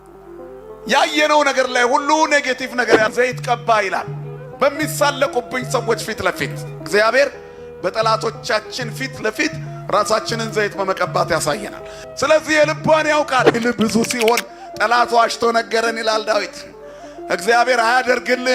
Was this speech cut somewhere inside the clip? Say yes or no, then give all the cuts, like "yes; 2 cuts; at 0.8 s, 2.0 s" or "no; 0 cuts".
yes; 2 cuts; at 3.1 s, 13.6 s